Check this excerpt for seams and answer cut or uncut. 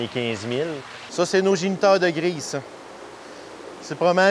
cut